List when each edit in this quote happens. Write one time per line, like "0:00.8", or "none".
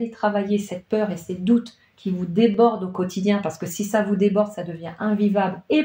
none